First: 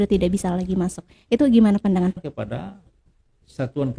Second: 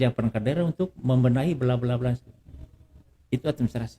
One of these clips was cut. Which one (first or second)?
first